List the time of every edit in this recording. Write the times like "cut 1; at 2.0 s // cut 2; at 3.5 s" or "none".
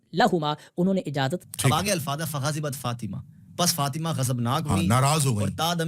cut 1; at 1.4 s